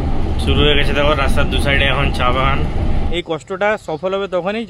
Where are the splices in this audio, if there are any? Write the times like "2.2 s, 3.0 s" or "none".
3.1 s